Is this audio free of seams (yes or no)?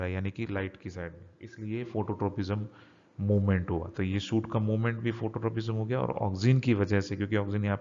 no